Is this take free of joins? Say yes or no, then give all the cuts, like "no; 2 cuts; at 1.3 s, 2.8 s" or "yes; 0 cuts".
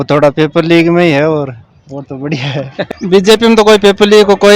no; 1 cut; at 2.9 s